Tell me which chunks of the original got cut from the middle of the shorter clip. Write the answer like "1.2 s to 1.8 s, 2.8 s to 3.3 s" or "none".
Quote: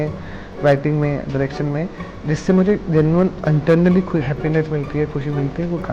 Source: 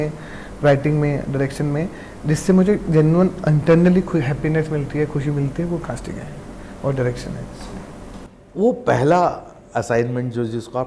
none